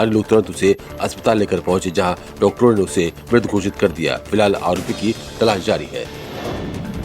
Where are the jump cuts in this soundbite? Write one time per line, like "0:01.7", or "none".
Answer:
0:06.2